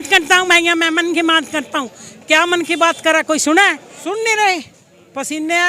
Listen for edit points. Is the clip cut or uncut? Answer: cut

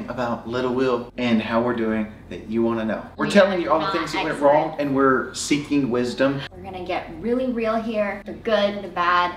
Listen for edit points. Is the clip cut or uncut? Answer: cut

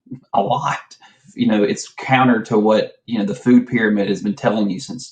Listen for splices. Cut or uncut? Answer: cut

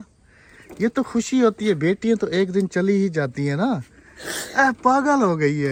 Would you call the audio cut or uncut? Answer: uncut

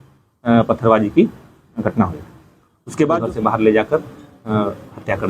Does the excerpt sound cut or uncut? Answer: cut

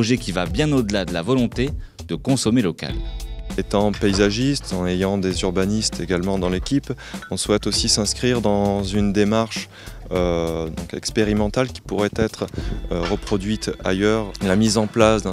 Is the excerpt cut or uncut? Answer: cut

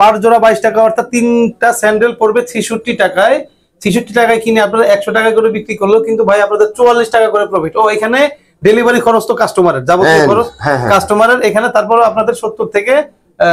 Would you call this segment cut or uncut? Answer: uncut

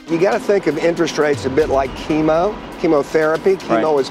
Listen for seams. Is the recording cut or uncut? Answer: cut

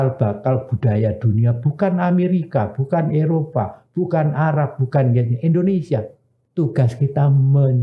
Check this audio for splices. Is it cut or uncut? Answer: cut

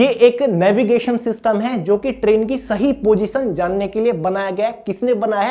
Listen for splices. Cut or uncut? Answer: uncut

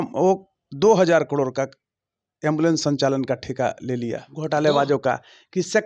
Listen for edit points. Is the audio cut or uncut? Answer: cut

